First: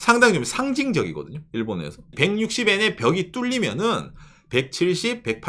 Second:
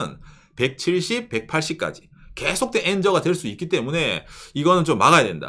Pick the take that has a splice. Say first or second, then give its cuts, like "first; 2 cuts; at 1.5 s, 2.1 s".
first; 1 cut; at 2.1 s